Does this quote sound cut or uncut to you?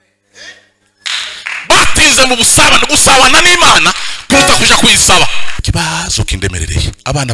cut